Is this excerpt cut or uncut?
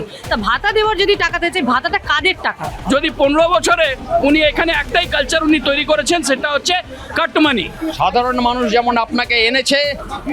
cut